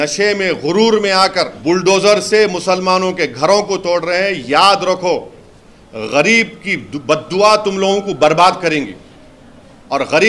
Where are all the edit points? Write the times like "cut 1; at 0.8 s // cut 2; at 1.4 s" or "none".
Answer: cut 1; at 1.5 s